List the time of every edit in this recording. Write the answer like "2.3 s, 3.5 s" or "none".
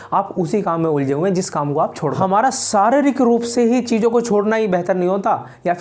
2.2 s